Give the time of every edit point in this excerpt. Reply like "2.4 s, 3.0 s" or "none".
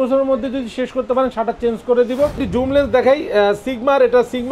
2.4 s

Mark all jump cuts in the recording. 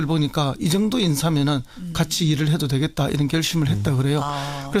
2.1 s

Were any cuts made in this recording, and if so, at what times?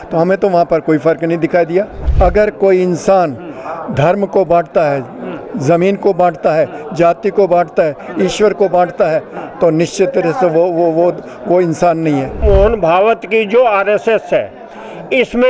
2.0 s, 12.4 s

